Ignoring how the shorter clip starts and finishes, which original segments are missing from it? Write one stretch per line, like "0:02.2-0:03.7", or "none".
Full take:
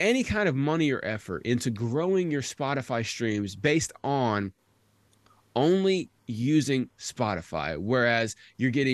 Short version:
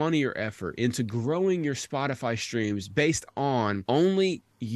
0:04.5-0:05.5